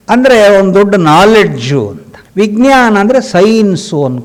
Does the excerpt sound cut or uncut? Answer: uncut